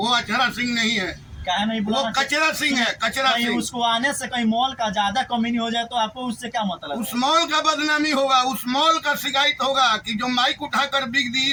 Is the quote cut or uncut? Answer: uncut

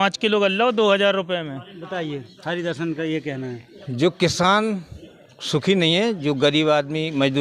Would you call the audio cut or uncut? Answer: uncut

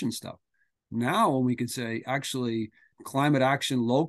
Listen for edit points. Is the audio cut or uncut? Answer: cut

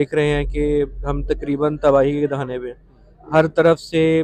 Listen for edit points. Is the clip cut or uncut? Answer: uncut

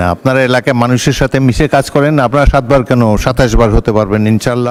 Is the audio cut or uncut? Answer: uncut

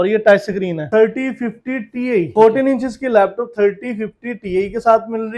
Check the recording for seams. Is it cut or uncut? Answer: cut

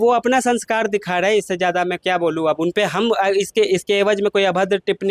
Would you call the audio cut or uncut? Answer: uncut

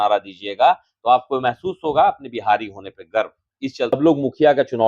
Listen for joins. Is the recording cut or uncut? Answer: cut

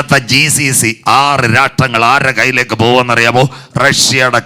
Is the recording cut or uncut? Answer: uncut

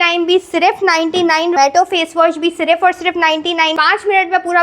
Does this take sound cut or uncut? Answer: cut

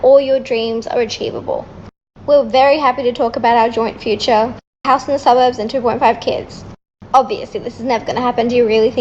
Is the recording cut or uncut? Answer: cut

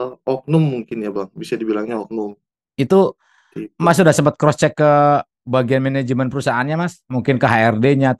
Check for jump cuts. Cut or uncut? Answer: uncut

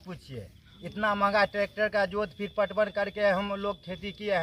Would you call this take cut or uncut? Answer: uncut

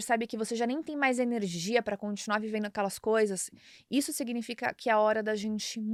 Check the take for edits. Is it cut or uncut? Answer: uncut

